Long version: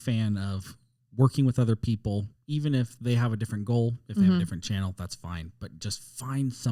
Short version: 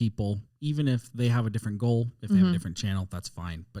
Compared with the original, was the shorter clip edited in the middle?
no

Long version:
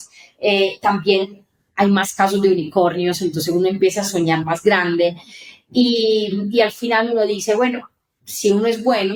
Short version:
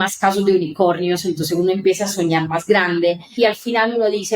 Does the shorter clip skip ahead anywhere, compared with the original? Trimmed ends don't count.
yes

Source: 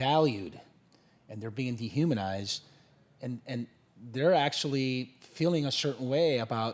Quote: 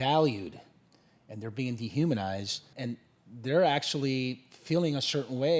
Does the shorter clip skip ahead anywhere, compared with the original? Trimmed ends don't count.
yes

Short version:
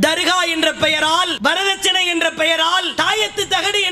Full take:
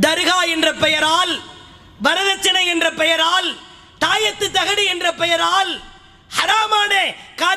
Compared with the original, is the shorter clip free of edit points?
no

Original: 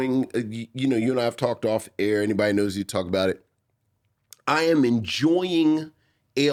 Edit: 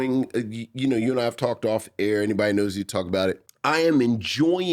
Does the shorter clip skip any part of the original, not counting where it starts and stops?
yes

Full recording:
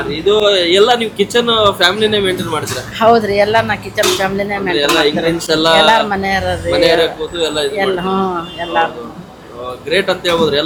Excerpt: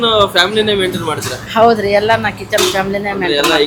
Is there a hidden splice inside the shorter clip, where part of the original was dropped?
no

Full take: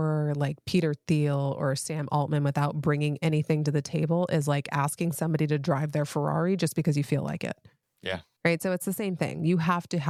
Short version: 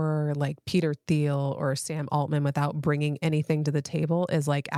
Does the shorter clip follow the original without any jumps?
yes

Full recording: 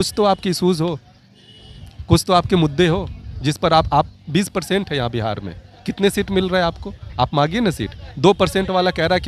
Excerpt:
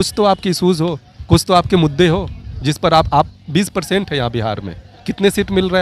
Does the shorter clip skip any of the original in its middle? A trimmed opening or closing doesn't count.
yes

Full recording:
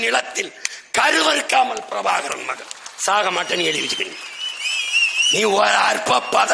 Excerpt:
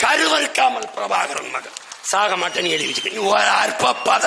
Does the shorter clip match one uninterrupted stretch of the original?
no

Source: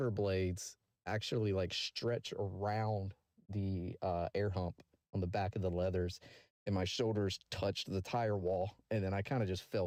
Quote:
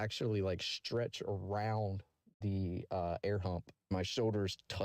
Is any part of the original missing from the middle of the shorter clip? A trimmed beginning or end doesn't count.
yes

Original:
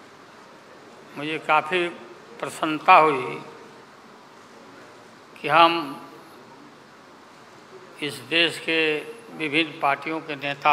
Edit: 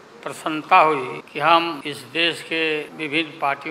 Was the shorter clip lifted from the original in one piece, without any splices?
no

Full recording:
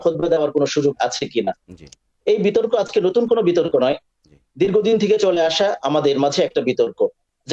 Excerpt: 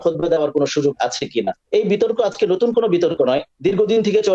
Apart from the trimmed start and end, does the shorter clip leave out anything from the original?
yes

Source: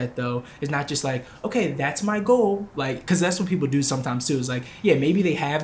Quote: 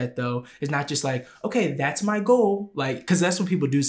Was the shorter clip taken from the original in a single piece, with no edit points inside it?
yes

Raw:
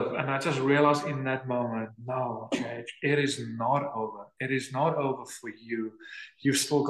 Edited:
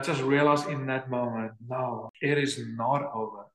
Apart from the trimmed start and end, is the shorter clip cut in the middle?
yes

